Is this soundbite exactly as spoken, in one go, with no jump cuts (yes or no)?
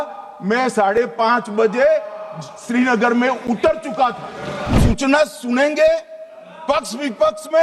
no